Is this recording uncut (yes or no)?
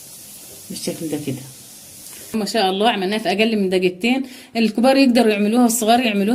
no